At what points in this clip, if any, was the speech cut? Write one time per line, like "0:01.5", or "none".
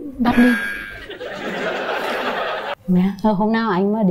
0:02.7